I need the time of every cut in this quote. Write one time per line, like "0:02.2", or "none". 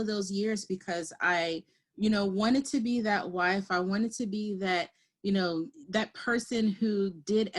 0:05.8